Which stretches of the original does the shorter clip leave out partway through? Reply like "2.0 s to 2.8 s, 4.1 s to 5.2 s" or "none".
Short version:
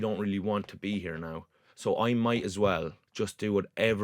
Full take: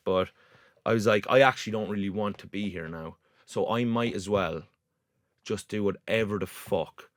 4.7 s to 5.3 s